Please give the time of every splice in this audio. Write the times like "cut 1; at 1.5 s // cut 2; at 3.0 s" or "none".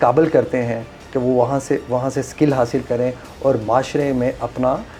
none

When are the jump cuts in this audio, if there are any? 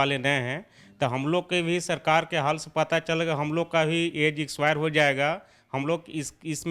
none

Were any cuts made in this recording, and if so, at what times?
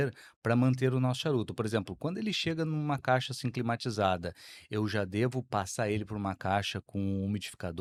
none

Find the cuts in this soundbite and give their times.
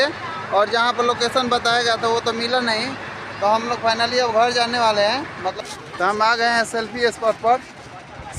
cut 1; at 5.5 s

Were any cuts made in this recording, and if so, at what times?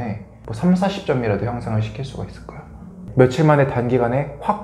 cut 1; at 3.0 s

